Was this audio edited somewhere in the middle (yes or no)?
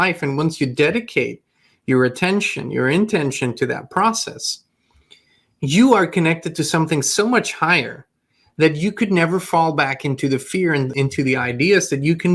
yes